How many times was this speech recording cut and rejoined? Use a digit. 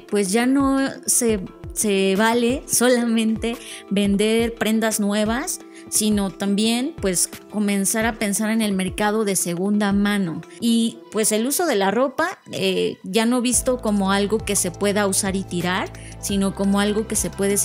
1